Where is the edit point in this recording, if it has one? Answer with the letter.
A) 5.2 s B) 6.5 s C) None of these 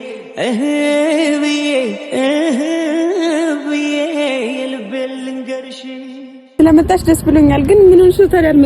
B